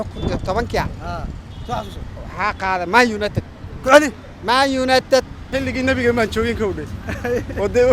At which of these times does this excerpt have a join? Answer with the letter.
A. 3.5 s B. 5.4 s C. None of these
B